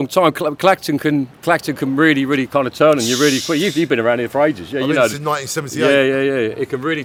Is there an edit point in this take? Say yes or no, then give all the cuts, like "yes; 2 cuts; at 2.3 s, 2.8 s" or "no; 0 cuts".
no; 0 cuts